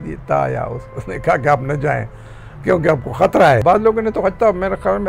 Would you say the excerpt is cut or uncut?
cut